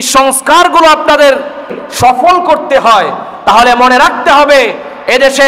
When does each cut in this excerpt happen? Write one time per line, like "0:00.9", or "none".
0:01.8